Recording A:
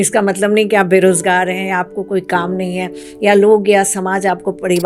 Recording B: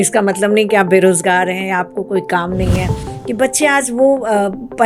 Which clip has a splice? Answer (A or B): B